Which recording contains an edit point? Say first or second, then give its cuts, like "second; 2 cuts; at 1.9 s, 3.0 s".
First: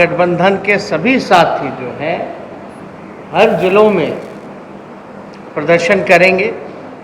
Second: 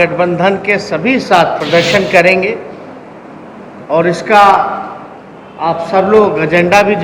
second; 1 cut; at 1.6 s